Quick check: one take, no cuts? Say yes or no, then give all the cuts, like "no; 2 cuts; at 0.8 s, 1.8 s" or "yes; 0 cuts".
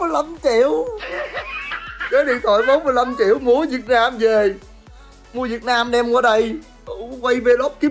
yes; 0 cuts